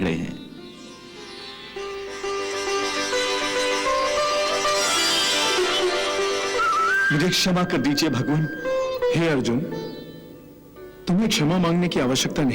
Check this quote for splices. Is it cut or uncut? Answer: cut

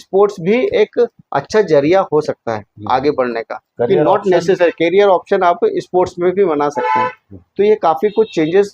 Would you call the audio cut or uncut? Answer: uncut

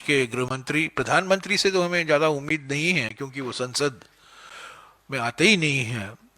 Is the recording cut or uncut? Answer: uncut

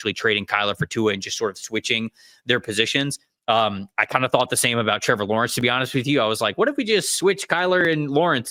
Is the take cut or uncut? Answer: uncut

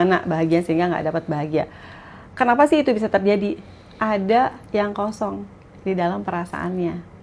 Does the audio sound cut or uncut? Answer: uncut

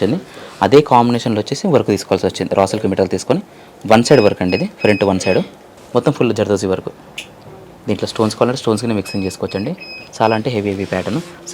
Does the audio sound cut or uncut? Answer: cut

